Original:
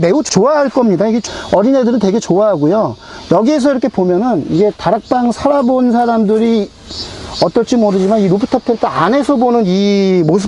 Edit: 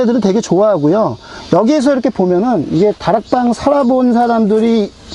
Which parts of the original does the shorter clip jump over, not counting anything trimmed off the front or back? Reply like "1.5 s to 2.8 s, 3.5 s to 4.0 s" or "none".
none